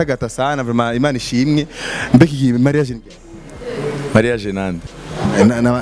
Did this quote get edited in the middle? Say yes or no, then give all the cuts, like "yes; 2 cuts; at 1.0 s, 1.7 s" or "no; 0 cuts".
no; 0 cuts